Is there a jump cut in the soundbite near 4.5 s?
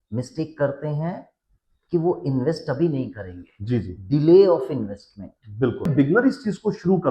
no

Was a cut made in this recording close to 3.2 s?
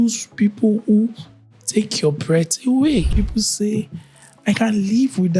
yes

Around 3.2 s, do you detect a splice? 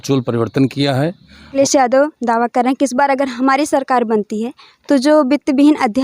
no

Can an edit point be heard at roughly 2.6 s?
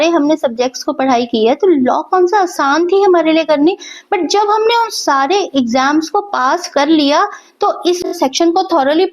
no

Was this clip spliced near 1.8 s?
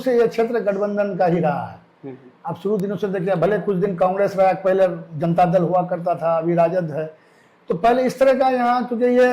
no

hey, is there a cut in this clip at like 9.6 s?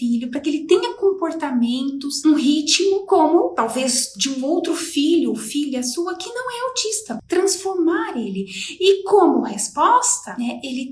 no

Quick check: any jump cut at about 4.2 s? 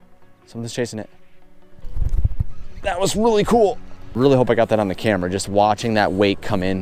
yes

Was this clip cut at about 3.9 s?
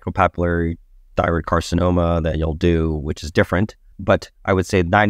yes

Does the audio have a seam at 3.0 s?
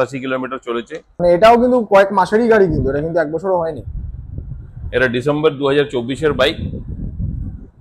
no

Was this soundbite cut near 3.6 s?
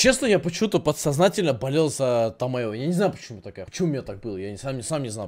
yes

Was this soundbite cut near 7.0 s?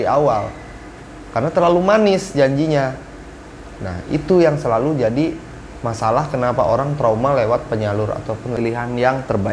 no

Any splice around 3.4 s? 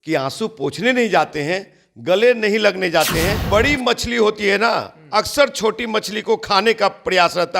yes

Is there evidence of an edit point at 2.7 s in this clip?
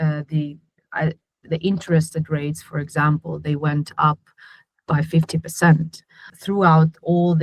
no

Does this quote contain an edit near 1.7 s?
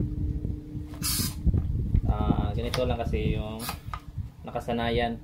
no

